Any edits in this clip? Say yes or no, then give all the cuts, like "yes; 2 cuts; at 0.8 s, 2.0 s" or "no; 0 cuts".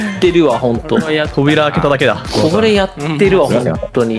no; 0 cuts